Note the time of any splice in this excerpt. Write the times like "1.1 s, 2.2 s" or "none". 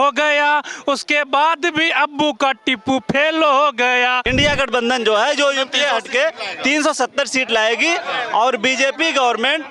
4.2 s